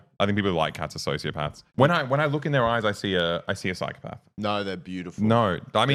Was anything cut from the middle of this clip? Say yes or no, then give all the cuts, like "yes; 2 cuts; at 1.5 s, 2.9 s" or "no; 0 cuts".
no; 0 cuts